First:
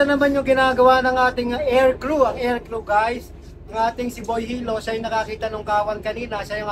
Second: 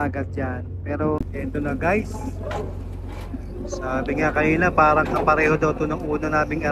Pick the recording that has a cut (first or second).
second